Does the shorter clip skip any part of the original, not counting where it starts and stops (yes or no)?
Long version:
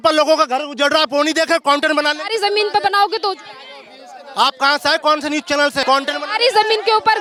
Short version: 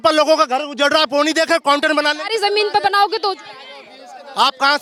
no